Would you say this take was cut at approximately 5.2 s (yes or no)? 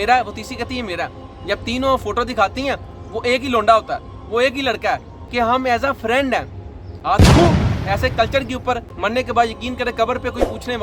yes